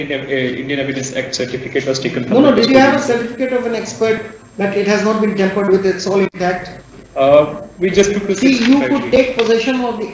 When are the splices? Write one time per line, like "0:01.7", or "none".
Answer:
none